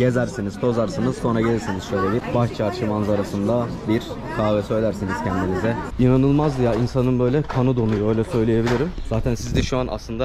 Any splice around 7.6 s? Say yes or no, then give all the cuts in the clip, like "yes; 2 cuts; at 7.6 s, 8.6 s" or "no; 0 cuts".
no; 2 cuts; at 2.3 s, 5.9 s